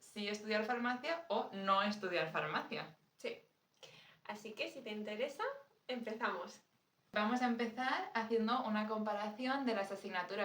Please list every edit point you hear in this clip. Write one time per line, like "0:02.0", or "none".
none